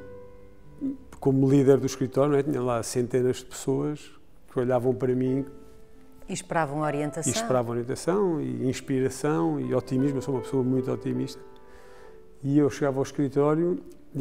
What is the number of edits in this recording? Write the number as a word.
zero